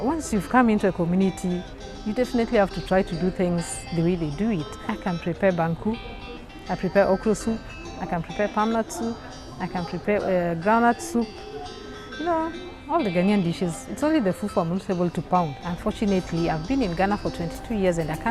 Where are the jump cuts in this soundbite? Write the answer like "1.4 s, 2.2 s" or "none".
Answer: 4.7 s, 15.6 s

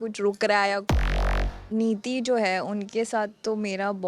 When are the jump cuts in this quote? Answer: 1.2 s

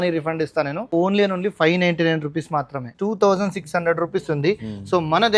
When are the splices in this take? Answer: 0.9 s, 2.9 s

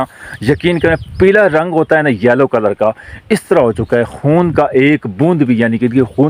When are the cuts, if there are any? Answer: none

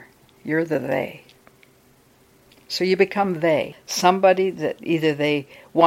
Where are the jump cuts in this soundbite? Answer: 3.8 s

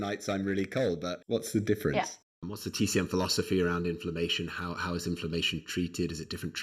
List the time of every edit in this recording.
1.2 s, 2.2 s

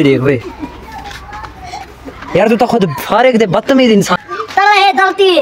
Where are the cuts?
4.1 s

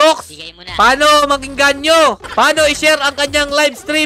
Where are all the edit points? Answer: 2.2 s

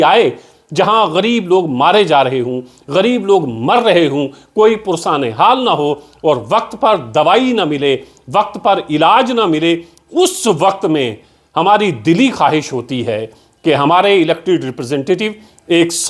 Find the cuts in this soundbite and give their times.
none

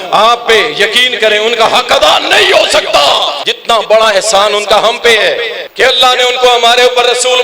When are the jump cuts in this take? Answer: 3.5 s, 5.6 s

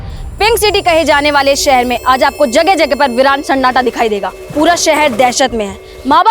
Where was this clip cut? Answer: 4.4 s

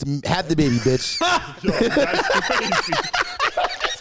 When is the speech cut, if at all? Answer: none

